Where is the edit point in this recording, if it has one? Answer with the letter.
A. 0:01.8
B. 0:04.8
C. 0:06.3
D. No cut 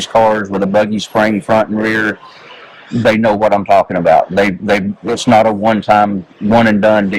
D